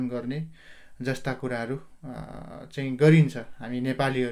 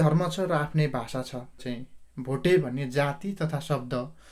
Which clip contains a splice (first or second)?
second